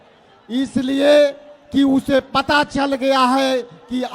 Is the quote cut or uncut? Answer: uncut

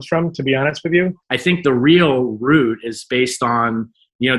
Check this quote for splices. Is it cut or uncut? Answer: cut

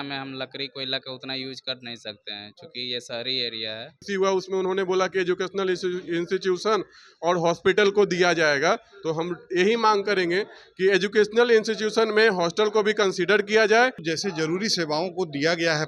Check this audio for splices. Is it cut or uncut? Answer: cut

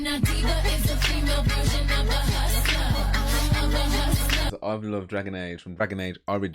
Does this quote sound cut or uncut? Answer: cut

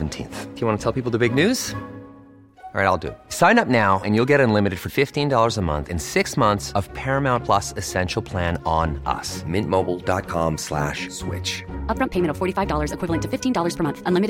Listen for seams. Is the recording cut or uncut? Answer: uncut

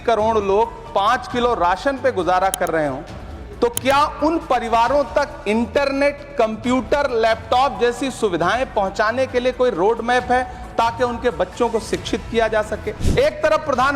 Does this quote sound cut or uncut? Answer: cut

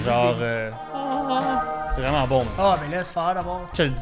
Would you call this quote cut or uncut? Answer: uncut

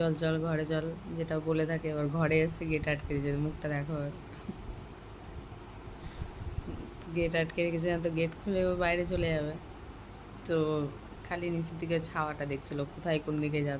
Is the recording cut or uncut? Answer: uncut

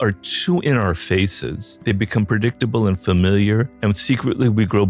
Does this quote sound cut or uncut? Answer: cut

